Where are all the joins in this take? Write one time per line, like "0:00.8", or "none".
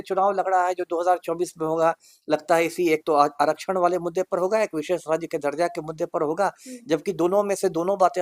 none